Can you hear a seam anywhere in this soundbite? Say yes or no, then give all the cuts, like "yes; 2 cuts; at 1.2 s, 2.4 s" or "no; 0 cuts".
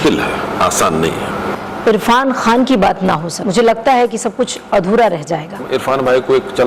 yes; 3 cuts; at 1.5 s, 3.4 s, 5.6 s